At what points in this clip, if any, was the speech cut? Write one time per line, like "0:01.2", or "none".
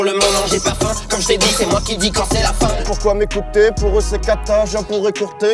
0:02.8